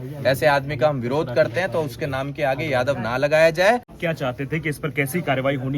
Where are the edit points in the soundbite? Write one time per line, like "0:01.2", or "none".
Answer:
0:04.0